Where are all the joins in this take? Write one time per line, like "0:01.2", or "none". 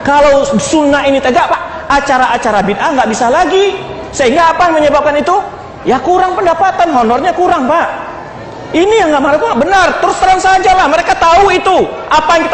0:01.5